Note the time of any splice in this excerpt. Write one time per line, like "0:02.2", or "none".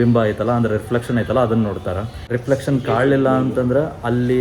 0:02.3